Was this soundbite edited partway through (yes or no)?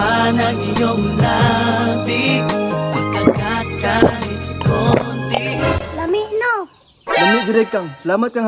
no